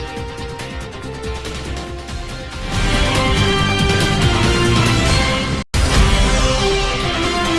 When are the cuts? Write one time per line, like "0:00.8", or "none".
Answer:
0:01.5
0:03.5